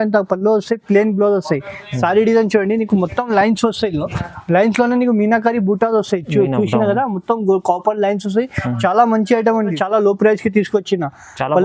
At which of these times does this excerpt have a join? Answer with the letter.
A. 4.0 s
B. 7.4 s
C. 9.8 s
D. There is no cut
C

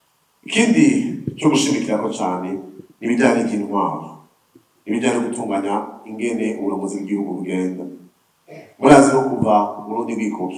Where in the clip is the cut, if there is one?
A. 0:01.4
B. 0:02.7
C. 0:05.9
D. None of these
D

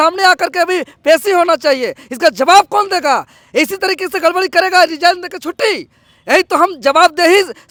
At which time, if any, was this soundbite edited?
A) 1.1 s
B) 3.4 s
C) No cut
C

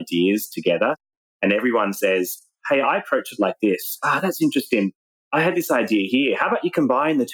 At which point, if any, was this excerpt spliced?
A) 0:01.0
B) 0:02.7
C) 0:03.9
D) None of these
A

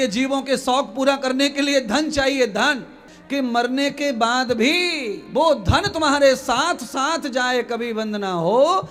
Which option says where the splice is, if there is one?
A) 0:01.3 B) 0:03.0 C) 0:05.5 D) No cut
B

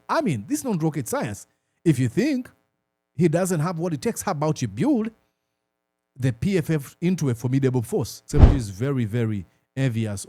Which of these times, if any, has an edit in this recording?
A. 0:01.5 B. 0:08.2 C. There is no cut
B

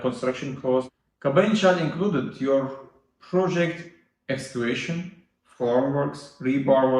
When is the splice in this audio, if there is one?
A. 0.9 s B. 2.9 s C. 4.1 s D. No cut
A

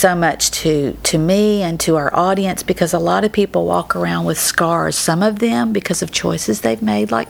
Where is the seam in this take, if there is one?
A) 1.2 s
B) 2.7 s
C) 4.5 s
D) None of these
D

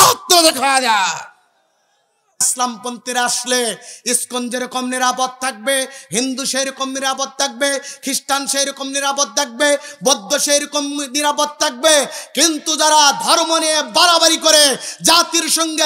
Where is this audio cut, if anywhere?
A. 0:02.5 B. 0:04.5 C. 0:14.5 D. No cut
A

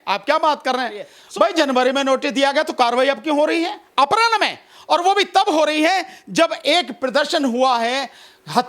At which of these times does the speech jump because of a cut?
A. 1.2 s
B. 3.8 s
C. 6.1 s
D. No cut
A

